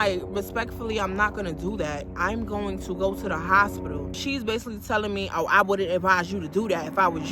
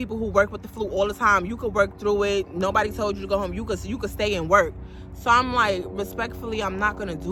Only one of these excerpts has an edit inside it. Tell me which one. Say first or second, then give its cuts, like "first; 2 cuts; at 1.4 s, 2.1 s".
first; 1 cut; at 4.2 s